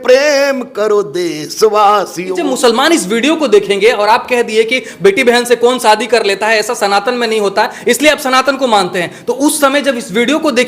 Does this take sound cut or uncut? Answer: cut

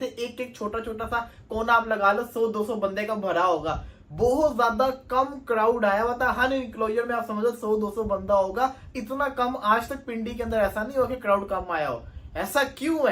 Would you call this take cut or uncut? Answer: uncut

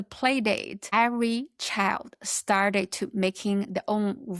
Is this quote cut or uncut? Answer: cut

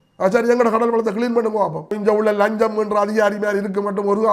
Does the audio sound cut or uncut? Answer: cut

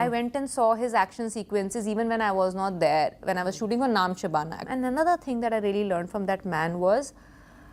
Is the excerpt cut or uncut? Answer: cut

